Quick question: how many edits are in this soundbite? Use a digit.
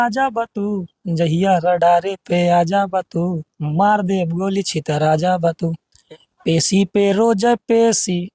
1